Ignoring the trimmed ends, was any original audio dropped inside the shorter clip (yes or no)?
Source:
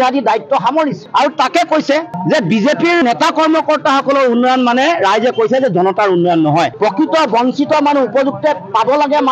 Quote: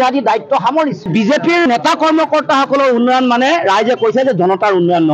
yes